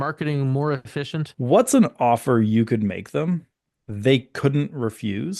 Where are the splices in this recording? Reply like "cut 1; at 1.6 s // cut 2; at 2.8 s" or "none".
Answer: cut 1; at 1.3 s